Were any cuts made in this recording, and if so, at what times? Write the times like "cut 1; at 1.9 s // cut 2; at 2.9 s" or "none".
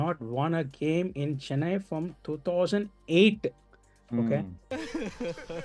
none